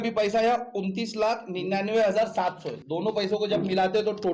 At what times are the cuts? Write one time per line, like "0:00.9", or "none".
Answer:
0:02.7